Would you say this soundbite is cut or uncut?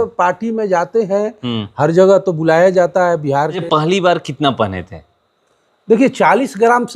cut